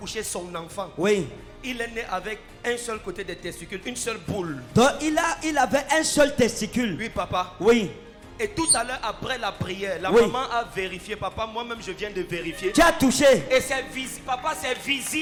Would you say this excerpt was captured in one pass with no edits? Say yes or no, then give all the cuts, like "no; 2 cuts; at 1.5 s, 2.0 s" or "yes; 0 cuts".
yes; 0 cuts